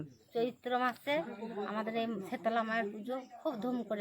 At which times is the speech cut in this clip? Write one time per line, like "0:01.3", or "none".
none

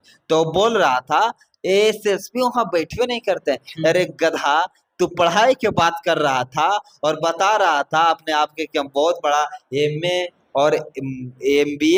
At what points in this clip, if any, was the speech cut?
none

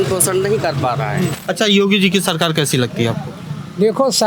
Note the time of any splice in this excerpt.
0:01.4

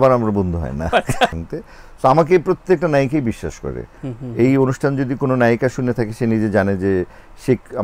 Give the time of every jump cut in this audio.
0:01.3

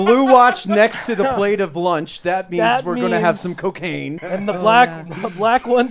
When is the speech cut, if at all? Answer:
0:04.2

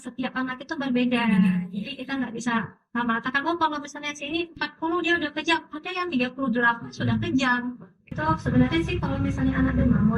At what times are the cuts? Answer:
0:08.2

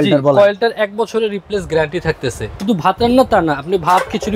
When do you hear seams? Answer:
0:02.6

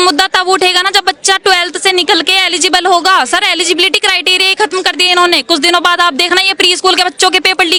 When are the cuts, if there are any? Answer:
none

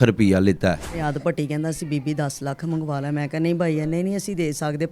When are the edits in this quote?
0:01.0

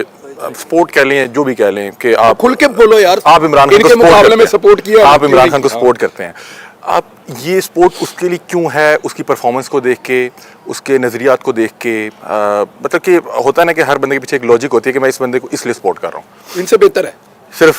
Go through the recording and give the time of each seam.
none

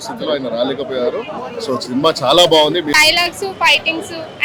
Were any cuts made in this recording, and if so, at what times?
0:02.9

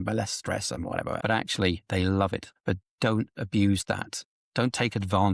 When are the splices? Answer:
0:01.2
0:02.5
0:04.2

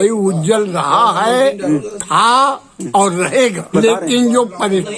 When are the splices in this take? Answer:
0:03.7

